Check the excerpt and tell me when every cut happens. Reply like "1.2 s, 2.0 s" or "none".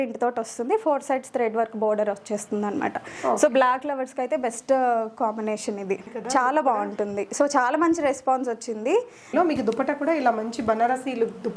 6.1 s, 9.3 s